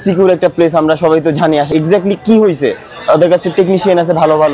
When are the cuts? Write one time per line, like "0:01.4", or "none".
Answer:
0:01.7